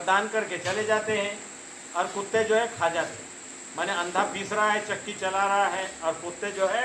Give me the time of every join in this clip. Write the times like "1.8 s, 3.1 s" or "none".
none